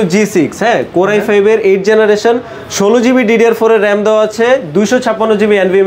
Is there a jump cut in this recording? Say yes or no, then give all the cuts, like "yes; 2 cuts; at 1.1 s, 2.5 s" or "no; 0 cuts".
no; 0 cuts